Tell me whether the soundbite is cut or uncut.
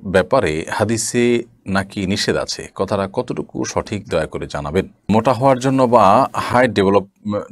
cut